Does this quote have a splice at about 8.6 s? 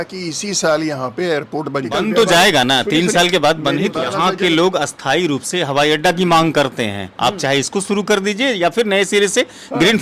no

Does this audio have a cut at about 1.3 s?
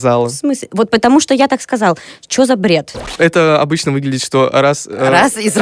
no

